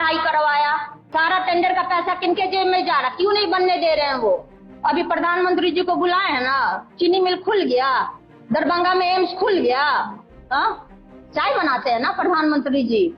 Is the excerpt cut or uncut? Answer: cut